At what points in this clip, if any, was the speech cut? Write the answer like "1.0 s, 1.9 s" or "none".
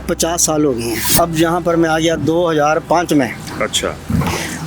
1.1 s